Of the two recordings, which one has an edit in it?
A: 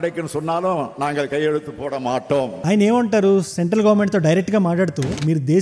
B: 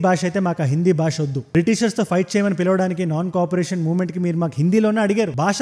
A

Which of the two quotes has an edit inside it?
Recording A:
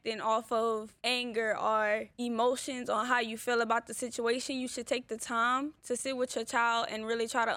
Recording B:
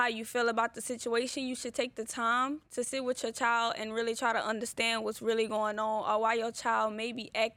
A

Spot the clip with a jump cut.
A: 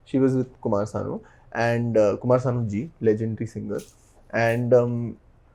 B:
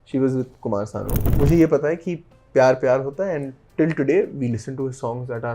B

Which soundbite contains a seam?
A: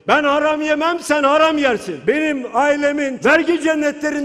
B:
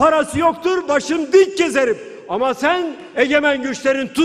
A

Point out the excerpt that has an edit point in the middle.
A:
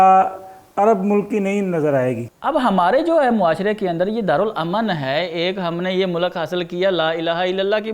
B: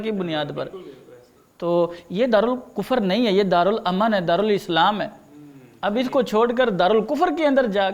A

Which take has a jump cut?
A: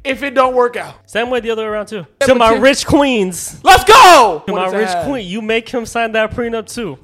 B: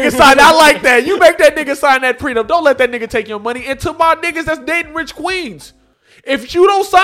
A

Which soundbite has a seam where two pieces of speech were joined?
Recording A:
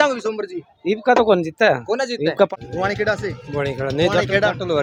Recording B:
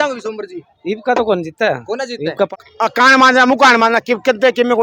B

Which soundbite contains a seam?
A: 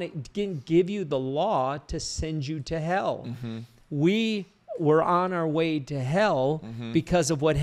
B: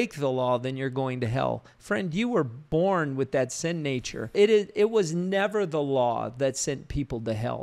B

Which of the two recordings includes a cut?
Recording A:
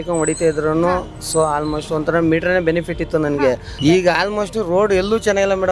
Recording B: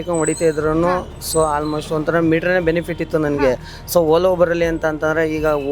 A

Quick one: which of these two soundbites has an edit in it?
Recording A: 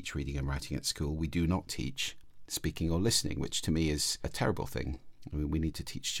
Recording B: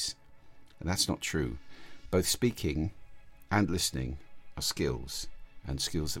A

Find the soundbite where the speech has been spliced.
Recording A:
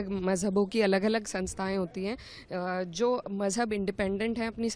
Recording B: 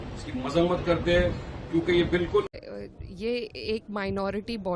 B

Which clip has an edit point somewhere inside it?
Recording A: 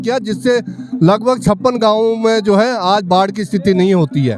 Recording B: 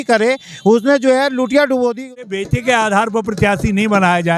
B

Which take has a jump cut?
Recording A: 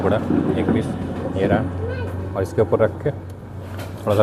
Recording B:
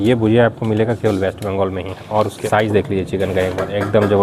B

